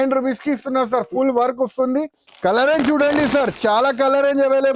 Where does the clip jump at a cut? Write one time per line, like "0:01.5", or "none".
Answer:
0:02.2